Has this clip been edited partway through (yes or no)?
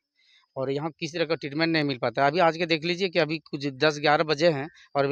no